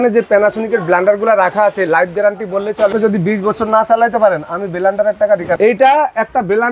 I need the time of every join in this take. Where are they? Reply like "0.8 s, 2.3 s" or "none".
2.9 s, 5.5 s